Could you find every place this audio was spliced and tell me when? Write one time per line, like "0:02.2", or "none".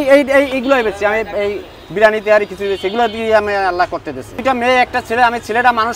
0:04.4